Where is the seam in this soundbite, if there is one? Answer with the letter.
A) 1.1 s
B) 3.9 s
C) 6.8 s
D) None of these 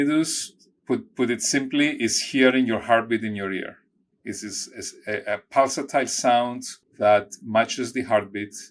D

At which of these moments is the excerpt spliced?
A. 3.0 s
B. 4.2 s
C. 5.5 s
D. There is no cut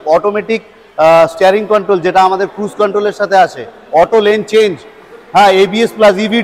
D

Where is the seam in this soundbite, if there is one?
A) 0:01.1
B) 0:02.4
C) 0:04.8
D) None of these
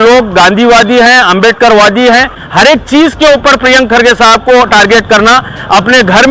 B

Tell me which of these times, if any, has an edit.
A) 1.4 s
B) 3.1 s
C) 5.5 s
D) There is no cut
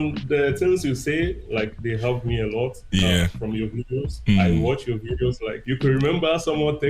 C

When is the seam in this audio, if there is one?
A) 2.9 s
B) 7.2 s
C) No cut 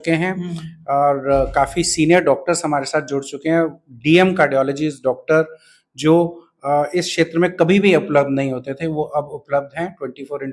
C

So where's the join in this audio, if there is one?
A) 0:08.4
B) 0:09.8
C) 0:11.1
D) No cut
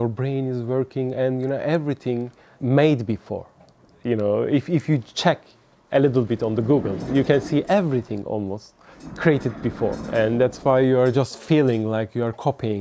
C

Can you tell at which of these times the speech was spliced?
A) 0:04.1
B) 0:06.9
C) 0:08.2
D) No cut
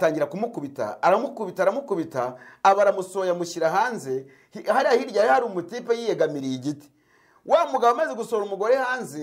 D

